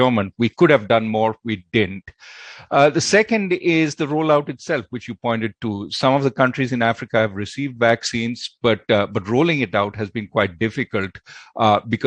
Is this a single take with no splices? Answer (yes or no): yes